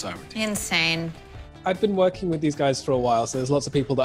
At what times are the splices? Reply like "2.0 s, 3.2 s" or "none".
1.4 s